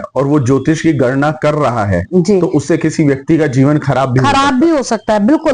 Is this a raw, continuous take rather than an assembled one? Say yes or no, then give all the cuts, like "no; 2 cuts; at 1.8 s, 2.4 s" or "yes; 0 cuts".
yes; 0 cuts